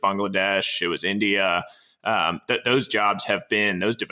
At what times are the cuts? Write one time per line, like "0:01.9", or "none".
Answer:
none